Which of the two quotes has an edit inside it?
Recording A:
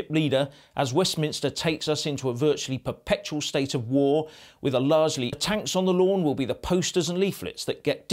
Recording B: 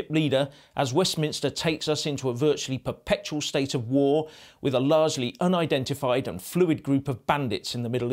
B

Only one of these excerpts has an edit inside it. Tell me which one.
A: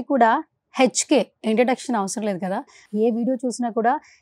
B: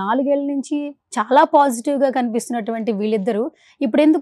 A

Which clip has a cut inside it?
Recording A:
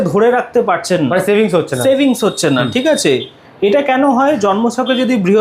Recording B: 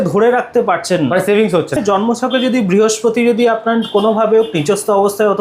B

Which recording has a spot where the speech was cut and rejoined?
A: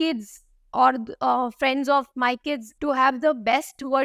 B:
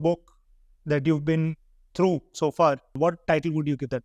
B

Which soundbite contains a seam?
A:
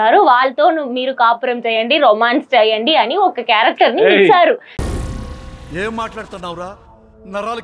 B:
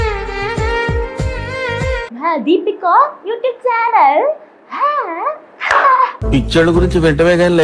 B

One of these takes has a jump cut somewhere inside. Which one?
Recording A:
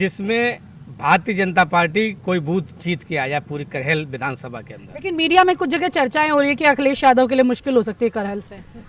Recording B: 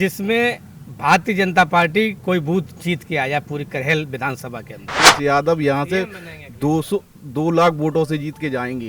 B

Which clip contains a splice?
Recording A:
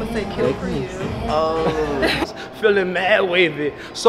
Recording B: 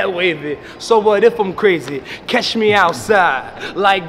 A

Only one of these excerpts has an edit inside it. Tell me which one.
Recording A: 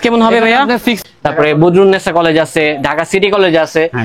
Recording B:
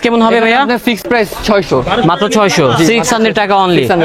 A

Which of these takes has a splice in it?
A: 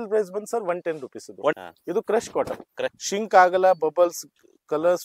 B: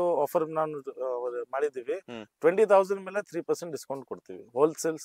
A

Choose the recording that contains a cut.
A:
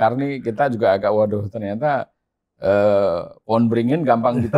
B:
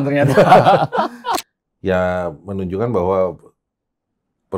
B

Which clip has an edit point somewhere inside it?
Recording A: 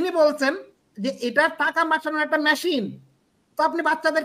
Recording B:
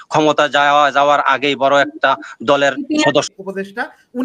B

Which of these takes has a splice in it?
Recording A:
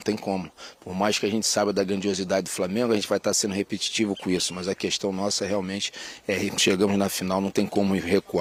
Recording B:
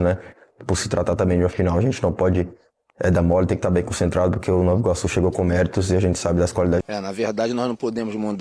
B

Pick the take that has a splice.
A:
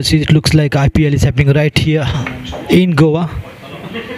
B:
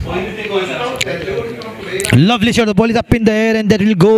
B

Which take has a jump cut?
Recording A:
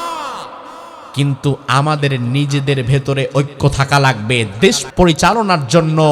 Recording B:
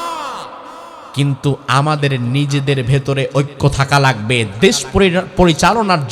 A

